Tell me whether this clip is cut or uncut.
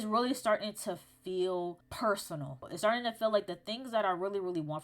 cut